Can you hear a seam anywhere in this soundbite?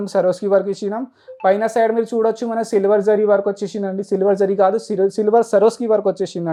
no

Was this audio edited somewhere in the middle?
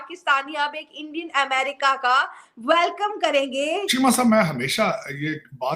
yes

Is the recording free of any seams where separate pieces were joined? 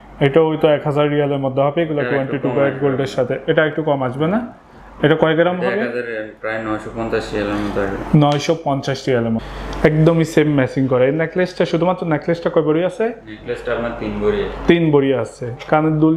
no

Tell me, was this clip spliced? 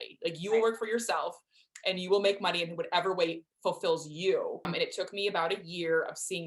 yes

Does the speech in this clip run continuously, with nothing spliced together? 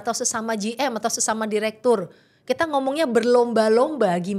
yes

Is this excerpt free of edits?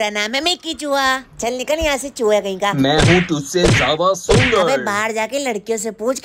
yes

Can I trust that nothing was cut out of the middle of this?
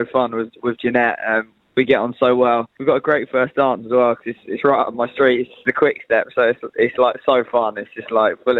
no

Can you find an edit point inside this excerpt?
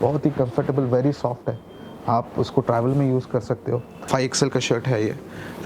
yes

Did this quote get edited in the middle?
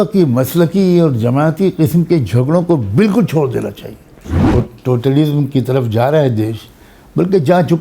yes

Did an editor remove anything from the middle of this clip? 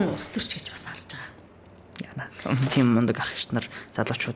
yes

